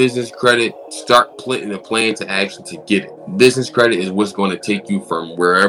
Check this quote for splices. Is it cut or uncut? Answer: cut